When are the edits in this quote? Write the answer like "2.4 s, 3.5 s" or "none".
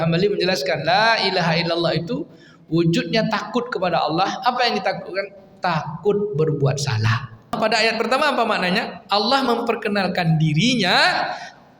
7.6 s